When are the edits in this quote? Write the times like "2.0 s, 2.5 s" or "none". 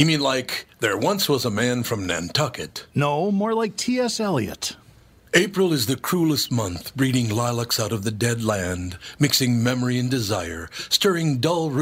none